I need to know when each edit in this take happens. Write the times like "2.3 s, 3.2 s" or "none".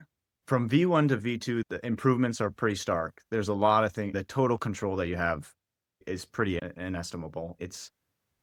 none